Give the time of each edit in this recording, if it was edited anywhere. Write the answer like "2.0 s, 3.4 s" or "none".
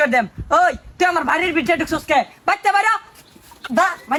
none